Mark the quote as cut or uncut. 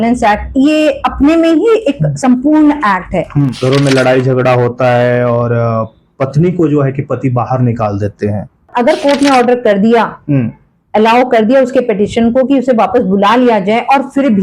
cut